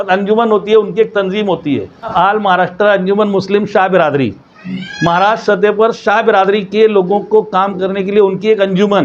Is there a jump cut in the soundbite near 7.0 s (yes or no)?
no